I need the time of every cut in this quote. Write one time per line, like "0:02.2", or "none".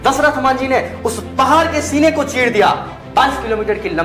none